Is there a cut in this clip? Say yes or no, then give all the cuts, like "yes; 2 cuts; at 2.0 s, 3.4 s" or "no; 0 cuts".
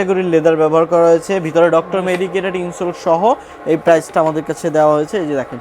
no; 0 cuts